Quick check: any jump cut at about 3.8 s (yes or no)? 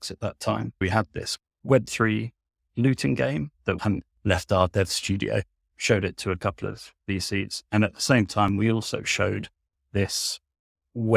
no